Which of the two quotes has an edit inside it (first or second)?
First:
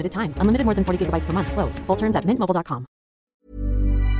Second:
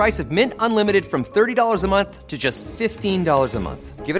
first